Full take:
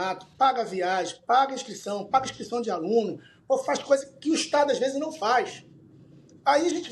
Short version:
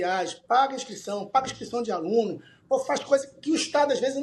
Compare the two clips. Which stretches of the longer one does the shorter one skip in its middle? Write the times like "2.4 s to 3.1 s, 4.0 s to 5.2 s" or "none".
none